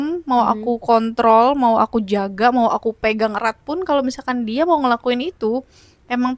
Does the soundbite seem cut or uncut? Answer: uncut